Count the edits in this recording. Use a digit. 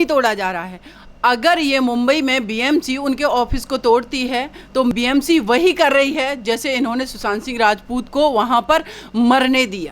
1